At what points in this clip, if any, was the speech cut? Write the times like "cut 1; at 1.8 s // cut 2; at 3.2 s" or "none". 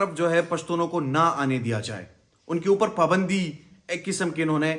none